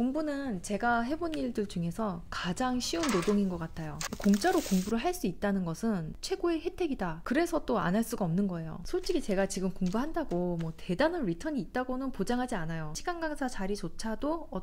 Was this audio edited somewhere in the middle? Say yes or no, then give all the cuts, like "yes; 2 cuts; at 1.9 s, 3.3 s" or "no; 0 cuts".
yes; 5 cuts; at 4.1 s, 6.1 s, 7.2 s, 8.7 s, 13.0 s